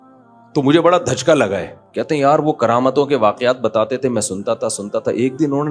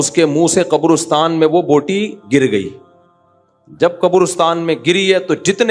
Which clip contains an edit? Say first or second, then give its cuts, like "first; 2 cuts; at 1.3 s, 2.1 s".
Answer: first; 1 cut; at 1.3 s